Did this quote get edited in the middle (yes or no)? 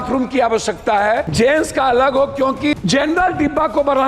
yes